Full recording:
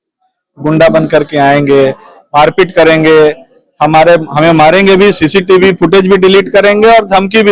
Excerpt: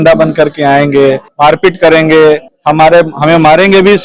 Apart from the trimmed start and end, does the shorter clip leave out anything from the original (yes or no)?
yes